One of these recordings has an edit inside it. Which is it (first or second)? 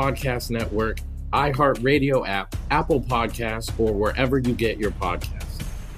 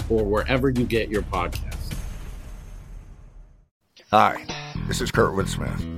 second